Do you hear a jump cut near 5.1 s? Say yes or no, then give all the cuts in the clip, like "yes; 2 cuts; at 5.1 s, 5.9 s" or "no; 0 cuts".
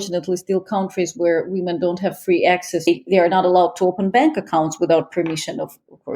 no; 1 cut; at 2.9 s